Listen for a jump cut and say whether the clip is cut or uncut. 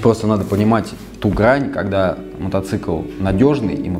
uncut